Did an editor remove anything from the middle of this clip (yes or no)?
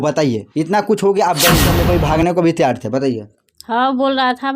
yes